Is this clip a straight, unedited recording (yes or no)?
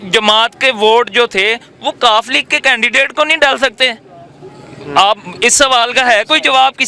yes